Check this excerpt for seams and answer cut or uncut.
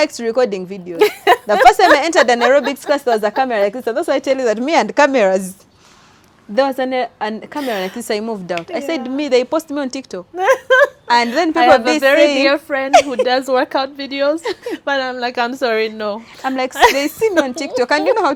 uncut